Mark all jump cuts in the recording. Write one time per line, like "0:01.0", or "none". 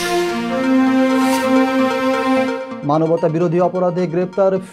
none